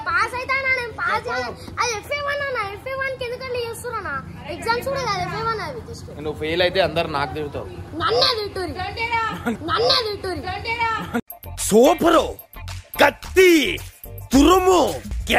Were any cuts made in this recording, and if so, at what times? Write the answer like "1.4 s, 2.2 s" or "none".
none